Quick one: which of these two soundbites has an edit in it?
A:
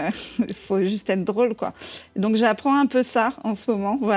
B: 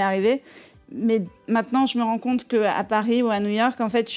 B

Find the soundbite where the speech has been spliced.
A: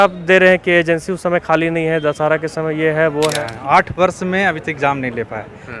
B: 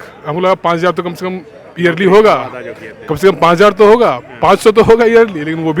A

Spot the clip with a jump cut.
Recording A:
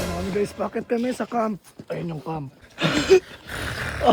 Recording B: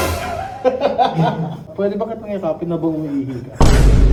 A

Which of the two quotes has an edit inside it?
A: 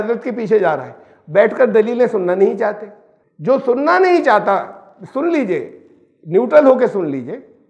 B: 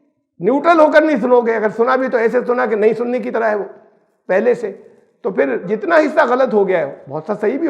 B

